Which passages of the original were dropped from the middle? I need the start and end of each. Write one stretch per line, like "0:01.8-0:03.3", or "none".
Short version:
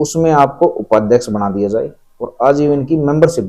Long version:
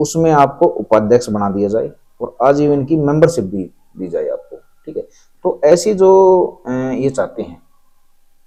none